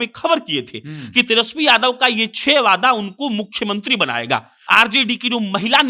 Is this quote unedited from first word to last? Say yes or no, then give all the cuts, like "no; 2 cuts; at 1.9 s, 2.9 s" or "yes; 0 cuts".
no; 1 cut; at 4.5 s